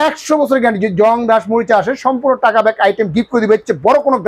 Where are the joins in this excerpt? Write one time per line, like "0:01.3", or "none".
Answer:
none